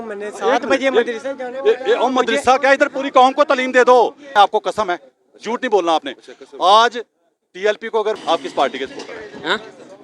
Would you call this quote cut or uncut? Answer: cut